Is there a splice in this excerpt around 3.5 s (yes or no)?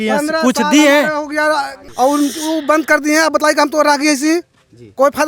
no